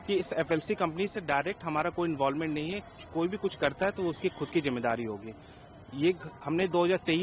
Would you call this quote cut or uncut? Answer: uncut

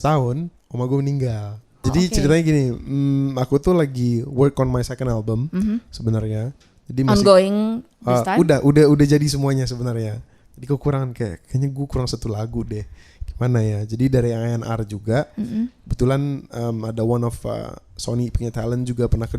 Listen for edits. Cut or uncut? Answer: cut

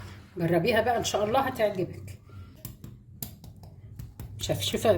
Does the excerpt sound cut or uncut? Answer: cut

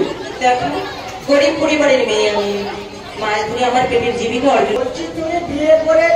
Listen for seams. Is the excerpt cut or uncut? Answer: cut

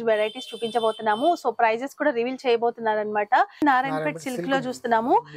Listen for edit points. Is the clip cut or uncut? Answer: cut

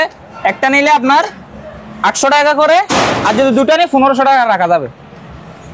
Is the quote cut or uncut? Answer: uncut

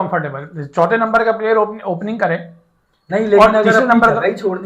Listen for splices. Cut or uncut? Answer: uncut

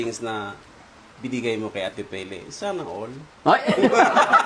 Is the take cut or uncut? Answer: uncut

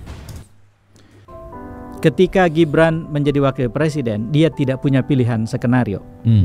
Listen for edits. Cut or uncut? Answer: cut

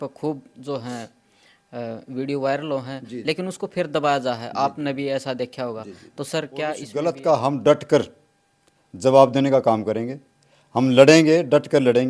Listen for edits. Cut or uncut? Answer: cut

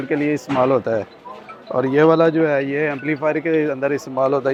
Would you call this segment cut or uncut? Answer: uncut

